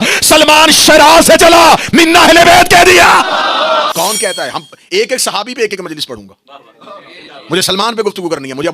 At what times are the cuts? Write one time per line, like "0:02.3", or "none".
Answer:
0:03.9